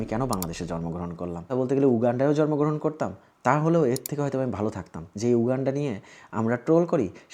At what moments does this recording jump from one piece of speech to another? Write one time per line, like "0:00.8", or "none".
0:01.5
0:05.0